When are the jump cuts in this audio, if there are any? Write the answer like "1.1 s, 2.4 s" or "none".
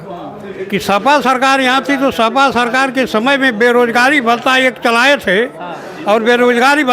none